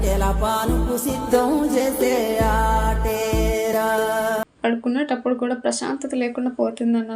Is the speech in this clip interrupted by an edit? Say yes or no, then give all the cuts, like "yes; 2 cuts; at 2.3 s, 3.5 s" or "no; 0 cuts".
yes; 1 cut; at 4.5 s